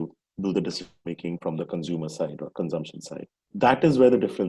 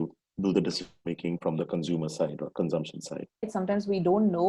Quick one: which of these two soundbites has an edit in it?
second; 1 cut; at 3.5 s

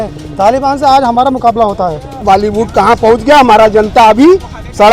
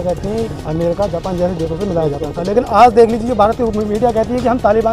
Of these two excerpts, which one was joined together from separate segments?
first; 1 cut; at 2.2 s

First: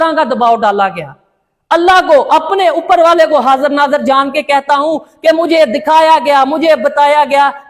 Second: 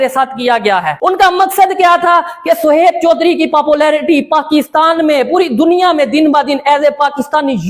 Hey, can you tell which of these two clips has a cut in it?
second; 1 cut; at 0.9 s

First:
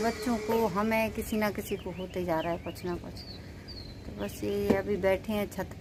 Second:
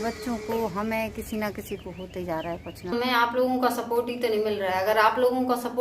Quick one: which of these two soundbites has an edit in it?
second; 1 cut; at 2.9 s

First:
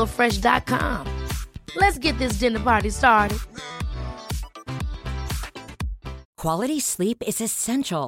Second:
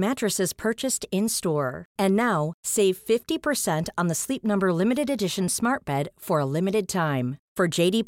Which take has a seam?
first; 1 cut; at 6.3 s

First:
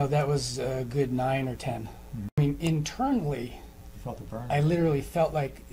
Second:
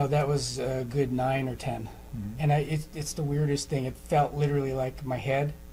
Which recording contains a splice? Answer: first; 1 cut; at 2.4 s

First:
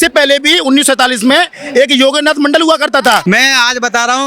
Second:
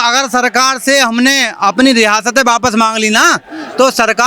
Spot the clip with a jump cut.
first; 1 cut; at 3.2 s

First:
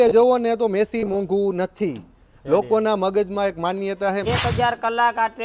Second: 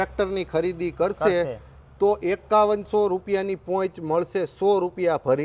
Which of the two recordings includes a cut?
first; 1 cut; at 4.2 s

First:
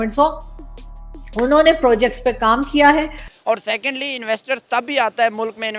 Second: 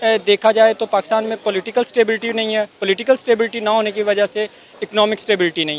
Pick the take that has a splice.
first; 1 cut; at 3.2 s

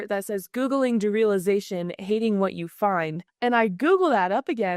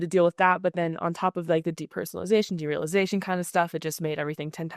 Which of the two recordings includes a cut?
first; 1 cut; at 3.2 s

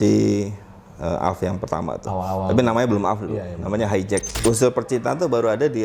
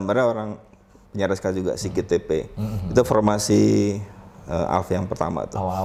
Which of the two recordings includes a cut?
first; 1 cut; at 4.3 s

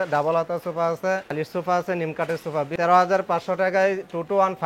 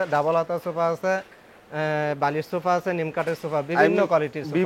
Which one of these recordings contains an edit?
first; 2 cuts; at 1.3 s, 2.7 s

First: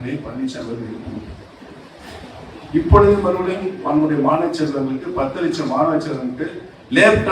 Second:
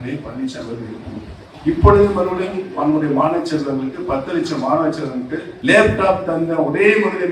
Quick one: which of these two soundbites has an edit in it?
second; 2 cuts; at 1.4 s, 5.5 s

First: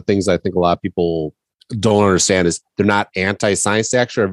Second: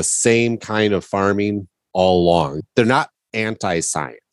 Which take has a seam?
second; 1 cut; at 2.6 s

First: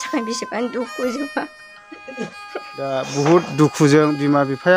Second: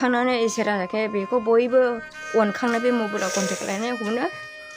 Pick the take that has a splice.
first; 1 cut; at 2.9 s

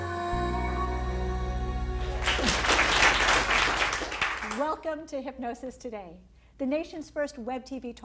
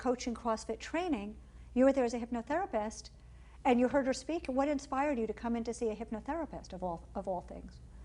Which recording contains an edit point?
second; 1 cut; at 5.3 s

